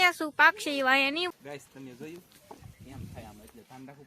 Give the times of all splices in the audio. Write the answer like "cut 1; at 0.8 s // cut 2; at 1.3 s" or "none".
cut 1; at 1.3 s